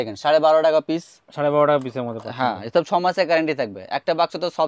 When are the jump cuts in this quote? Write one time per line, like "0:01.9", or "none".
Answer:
none